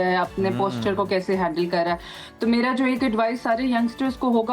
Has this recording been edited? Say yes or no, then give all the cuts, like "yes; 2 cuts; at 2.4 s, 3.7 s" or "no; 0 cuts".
no; 0 cuts